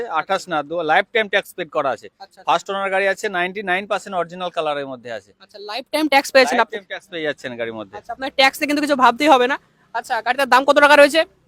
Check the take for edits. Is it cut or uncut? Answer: uncut